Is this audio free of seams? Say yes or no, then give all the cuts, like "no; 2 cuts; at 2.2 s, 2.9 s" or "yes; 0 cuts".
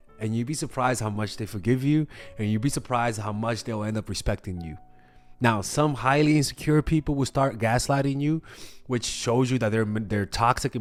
yes; 0 cuts